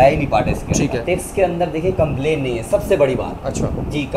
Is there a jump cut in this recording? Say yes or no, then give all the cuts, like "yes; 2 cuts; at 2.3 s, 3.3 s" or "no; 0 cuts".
yes; 1 cut; at 1.0 s